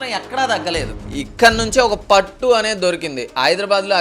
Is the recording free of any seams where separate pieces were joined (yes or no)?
no